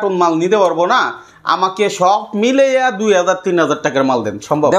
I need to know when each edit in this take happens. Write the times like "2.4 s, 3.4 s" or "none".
none